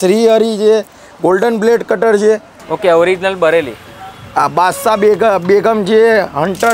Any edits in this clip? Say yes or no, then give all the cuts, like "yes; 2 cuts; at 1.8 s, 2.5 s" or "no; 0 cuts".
no; 0 cuts